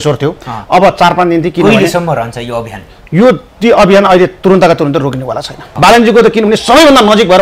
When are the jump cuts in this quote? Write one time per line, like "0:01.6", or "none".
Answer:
0:05.7